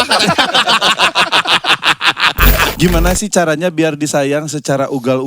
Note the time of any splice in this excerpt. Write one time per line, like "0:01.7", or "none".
0:02.6